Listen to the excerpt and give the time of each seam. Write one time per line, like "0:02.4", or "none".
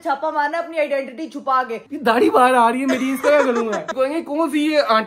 0:01.8
0:03.9